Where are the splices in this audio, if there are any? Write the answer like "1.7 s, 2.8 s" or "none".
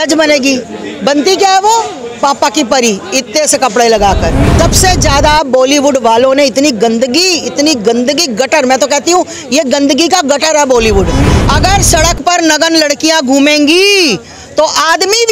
4.4 s, 11.3 s

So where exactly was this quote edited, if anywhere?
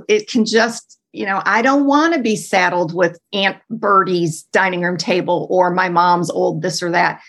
3.2 s

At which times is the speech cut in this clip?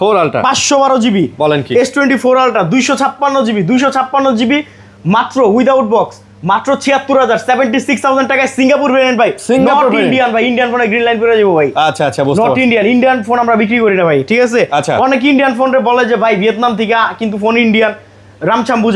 none

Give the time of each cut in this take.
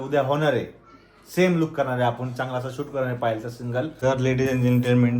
3.9 s

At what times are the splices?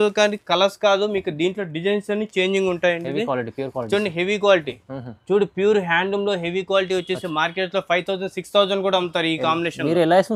none

